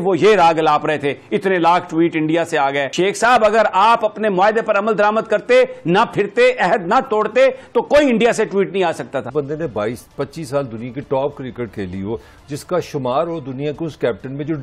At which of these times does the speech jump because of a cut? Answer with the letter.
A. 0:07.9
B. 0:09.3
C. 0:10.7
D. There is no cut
B